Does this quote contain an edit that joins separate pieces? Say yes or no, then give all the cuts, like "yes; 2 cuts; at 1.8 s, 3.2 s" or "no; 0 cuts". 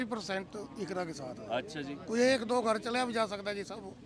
no; 0 cuts